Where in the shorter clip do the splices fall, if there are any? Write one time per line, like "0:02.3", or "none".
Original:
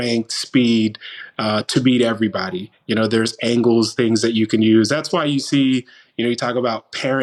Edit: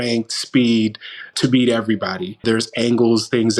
0:01.3
0:02.4